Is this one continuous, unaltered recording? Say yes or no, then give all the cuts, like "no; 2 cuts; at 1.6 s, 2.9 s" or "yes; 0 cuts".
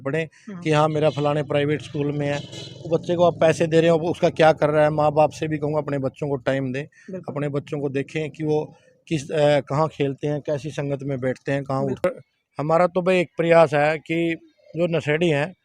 no; 1 cut; at 12.0 s